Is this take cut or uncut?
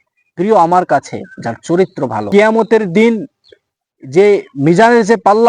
cut